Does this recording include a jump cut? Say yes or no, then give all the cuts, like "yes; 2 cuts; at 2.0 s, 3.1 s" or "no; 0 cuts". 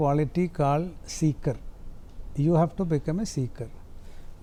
no; 0 cuts